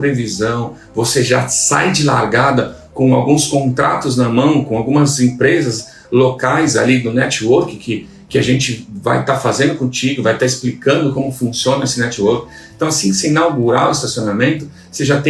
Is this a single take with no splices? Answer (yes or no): yes